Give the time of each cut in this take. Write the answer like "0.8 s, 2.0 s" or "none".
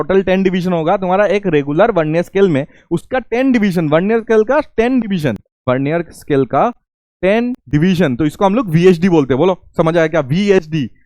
5.5 s, 7.5 s